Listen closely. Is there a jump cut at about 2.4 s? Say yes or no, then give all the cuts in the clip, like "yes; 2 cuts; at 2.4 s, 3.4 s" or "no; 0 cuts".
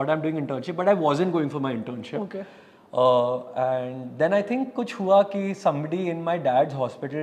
no; 0 cuts